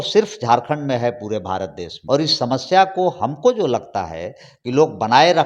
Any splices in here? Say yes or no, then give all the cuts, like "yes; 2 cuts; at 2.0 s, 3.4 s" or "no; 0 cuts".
yes; 1 cut; at 1.9 s